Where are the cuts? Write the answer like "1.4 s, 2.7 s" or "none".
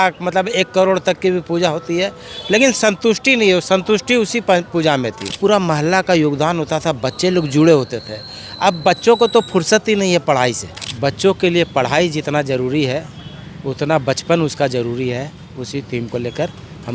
5.4 s, 10.8 s